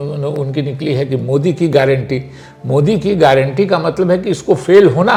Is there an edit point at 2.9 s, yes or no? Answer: no